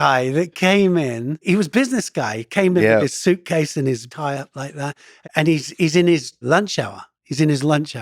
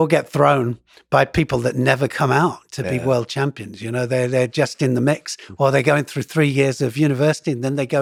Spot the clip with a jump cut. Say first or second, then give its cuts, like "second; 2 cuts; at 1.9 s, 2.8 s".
first; 4 cuts; at 1.4 s, 4.1 s, 5.1 s, 6.4 s